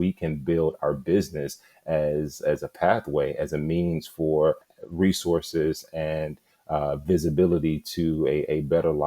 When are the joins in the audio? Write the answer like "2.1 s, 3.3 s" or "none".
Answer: 4.7 s